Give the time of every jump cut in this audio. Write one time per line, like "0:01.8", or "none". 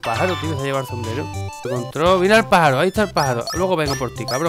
0:01.7